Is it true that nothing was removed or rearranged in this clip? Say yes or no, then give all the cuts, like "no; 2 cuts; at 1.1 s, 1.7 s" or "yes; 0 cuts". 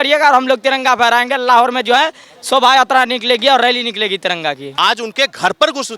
no; 1 cut; at 4.7 s